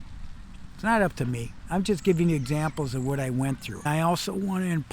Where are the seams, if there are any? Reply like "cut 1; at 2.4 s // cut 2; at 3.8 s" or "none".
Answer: cut 1; at 3.8 s